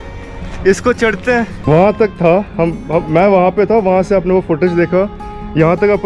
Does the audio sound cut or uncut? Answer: cut